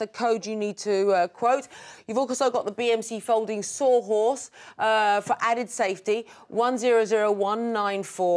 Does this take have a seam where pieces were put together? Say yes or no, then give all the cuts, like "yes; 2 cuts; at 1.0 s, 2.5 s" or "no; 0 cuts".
no; 0 cuts